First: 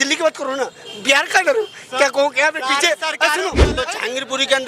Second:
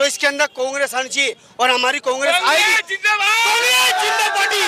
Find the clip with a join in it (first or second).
first